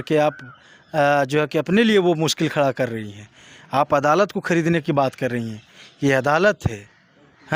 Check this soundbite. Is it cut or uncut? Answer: uncut